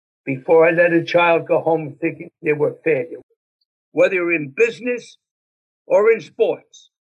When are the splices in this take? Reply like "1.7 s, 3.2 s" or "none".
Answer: 3.1 s